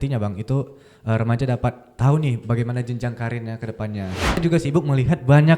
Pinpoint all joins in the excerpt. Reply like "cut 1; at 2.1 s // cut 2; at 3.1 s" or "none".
cut 1; at 4.4 s